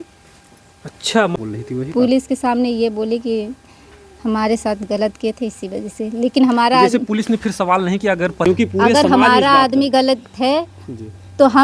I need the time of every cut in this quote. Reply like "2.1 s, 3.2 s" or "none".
1.4 s, 8.4 s